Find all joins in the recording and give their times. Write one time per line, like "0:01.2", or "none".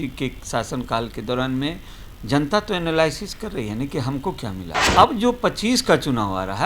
0:04.8